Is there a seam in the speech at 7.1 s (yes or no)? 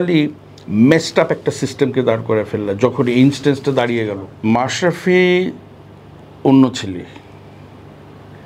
no